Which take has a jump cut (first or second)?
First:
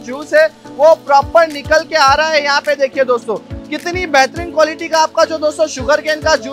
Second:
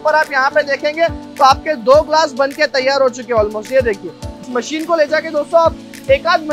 second